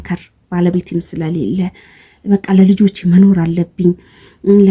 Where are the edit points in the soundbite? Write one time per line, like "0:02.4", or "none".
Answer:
none